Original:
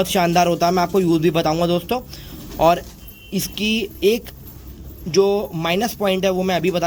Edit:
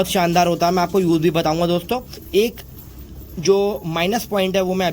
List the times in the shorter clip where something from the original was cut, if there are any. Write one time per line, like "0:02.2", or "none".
0:02.2